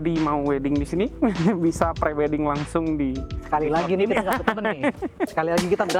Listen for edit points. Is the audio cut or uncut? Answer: uncut